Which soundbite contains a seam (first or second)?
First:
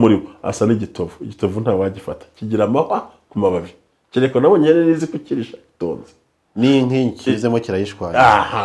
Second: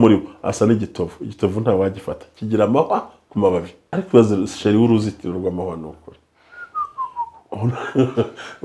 second